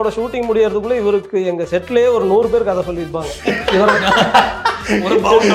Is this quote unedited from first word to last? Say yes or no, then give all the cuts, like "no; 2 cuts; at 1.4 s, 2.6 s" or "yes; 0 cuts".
yes; 0 cuts